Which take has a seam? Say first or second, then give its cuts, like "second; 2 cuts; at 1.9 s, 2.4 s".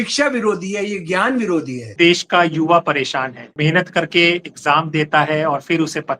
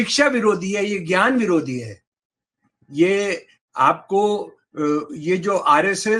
first; 2 cuts; at 1.9 s, 3.6 s